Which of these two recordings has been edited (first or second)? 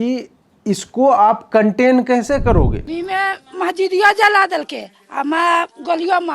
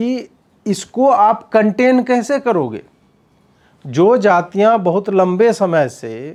first